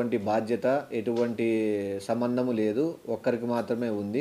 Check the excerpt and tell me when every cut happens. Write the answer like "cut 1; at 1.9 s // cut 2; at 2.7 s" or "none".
none